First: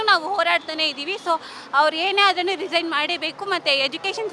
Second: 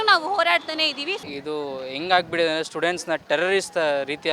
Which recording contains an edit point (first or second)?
second